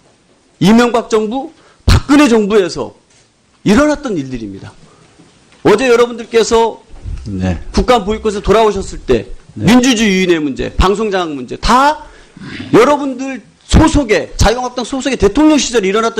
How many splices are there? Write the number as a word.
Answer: one